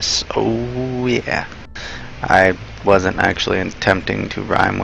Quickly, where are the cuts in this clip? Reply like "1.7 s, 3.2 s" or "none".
2.7 s